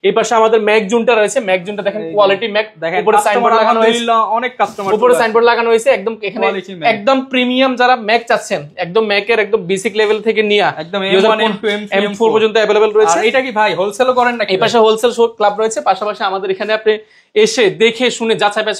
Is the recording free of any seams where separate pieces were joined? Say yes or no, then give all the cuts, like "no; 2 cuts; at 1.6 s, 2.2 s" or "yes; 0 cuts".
yes; 0 cuts